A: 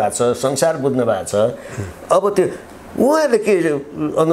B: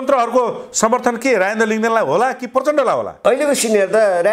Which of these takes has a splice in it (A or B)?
B